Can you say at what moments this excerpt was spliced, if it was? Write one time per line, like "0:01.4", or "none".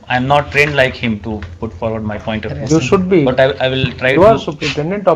none